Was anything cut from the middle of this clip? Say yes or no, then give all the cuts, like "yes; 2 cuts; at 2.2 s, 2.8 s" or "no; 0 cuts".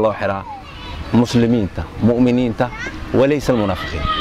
no; 0 cuts